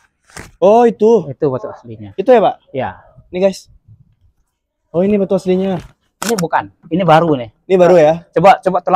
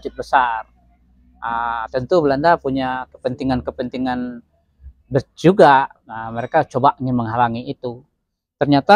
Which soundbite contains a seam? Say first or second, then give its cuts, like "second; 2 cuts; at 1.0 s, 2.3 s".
first; 1 cut; at 6.2 s